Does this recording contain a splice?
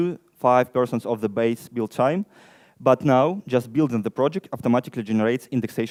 no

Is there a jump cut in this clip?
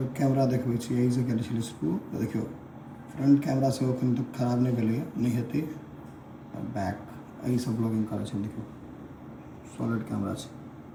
no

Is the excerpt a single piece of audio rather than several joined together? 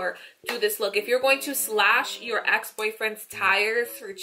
yes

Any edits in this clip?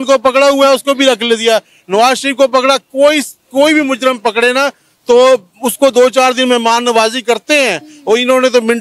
no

